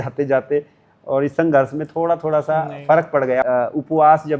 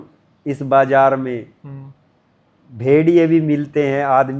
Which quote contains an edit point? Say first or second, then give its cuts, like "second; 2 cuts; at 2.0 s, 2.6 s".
first; 1 cut; at 3.4 s